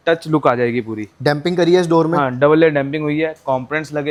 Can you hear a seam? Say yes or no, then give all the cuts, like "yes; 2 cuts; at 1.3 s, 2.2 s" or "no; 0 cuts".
no; 0 cuts